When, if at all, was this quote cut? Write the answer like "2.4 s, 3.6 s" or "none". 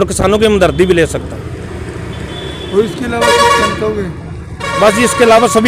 none